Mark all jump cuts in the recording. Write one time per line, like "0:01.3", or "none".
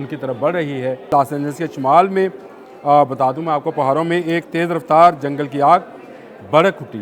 0:01.1